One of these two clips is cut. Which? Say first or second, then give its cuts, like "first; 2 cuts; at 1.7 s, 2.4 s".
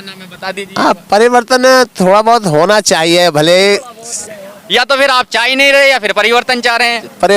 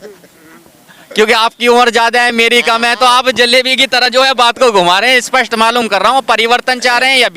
first; 1 cut; at 4.2 s